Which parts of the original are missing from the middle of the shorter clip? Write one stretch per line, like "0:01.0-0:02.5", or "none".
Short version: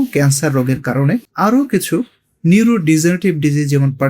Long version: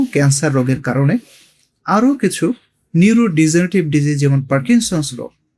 0:01.3-0:01.8